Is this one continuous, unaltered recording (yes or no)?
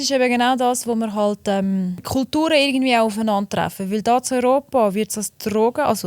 no